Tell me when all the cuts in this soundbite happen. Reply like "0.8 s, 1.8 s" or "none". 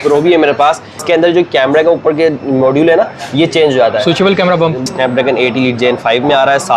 1.0 s, 4.9 s